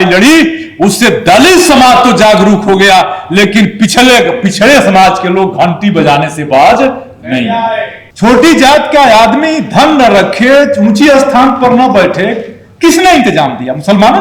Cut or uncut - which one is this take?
cut